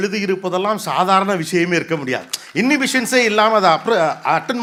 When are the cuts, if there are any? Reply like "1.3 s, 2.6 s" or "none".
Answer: none